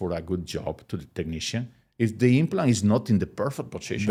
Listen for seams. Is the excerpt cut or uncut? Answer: uncut